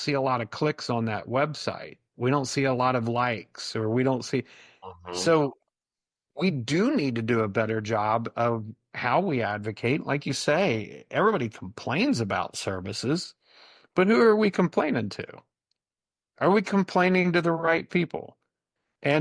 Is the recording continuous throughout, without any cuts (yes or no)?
yes